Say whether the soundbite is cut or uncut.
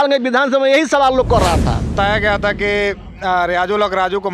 cut